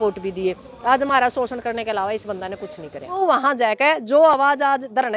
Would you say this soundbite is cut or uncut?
cut